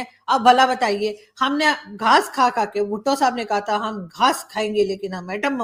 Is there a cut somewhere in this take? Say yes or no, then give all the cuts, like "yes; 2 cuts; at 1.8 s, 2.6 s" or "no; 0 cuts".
no; 0 cuts